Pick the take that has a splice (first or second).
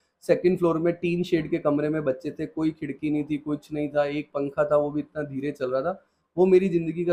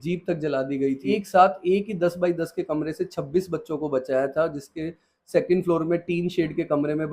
second